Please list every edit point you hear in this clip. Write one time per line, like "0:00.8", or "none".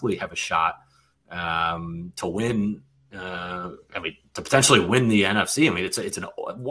none

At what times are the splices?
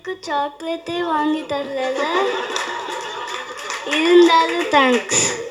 none

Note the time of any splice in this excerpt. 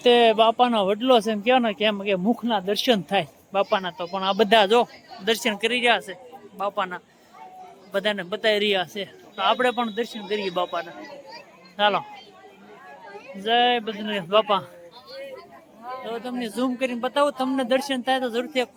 none

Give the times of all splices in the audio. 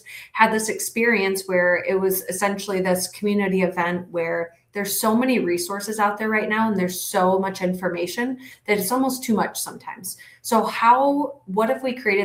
none

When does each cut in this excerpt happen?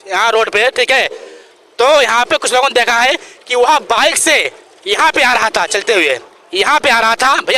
none

